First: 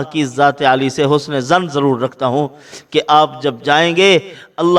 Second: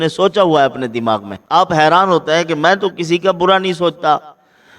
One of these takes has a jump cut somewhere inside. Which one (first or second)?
second